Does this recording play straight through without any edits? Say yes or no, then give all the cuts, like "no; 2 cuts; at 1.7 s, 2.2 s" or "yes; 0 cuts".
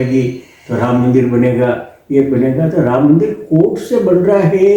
yes; 0 cuts